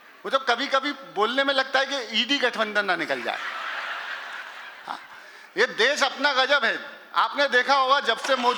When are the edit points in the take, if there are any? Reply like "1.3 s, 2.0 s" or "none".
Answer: none